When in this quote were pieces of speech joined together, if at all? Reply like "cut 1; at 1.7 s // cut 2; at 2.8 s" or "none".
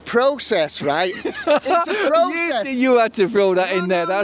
none